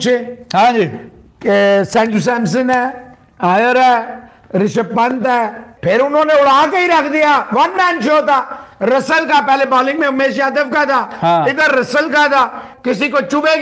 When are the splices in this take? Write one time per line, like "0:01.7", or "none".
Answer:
0:05.7
0:12.7